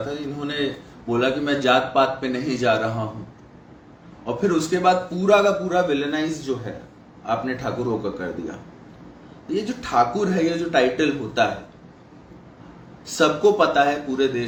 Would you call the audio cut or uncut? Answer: uncut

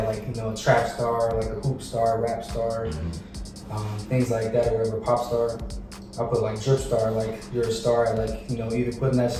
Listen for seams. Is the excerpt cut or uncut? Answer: uncut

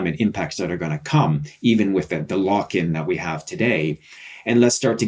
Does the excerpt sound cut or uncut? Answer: uncut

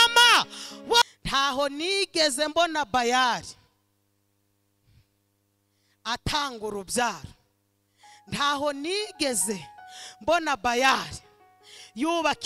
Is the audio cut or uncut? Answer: cut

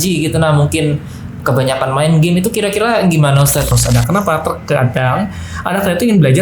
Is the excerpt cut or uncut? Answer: cut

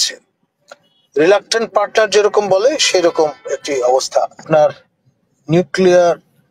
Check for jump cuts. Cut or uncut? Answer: cut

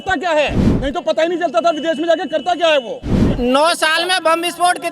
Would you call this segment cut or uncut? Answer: cut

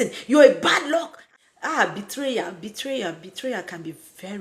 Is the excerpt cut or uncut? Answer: cut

